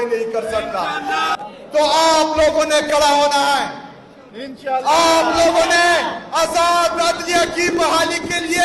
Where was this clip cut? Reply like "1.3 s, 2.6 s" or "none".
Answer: 1.3 s